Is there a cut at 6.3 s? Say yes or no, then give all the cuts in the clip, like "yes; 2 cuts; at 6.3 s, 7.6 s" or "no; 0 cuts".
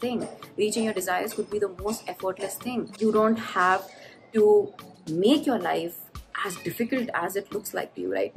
no; 1 cut; at 2.9 s